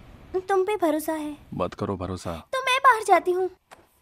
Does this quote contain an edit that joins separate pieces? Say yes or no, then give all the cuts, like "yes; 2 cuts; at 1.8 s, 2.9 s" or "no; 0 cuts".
yes; 2 cuts; at 1.4 s, 2.4 s